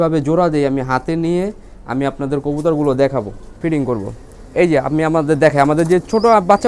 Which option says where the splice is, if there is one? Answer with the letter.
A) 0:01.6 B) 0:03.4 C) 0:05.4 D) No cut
B